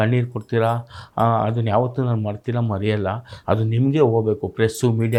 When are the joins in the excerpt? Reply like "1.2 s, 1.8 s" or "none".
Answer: none

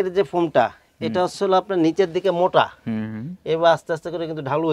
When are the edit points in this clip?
none

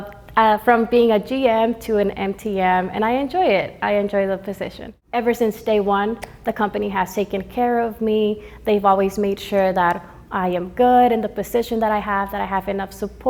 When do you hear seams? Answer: none

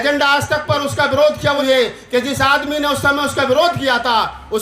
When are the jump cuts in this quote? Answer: 1.6 s

